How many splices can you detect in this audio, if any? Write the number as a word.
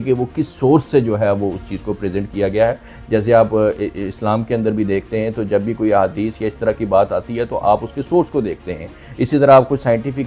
zero